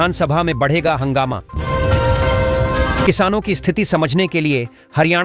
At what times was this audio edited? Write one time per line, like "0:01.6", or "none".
0:01.5
0:03.0

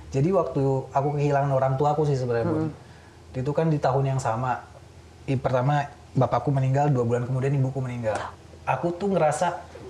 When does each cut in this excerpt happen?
0:08.3

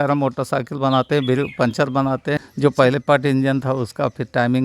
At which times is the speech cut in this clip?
0:02.4

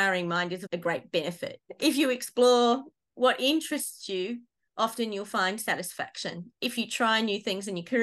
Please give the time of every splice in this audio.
0:01.6
0:06.5

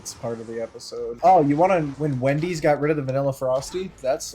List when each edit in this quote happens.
0:01.1
0:01.9

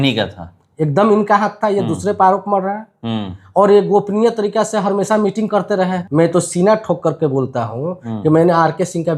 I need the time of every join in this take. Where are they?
0:06.0

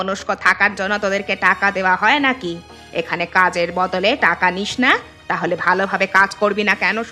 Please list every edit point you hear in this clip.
none

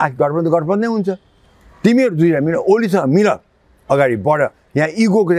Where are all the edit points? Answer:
none

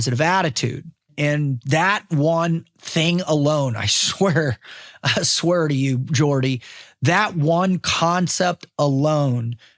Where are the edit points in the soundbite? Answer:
0:01.1

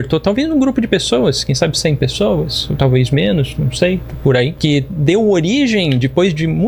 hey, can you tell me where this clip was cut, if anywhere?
none

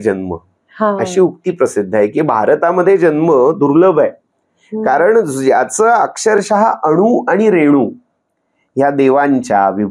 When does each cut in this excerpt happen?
none

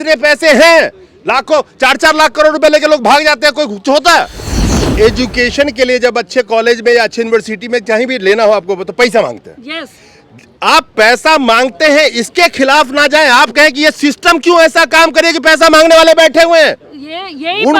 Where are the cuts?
0:04.8

